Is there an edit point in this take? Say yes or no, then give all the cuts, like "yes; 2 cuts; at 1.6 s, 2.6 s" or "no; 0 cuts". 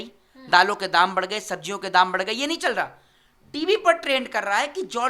no; 0 cuts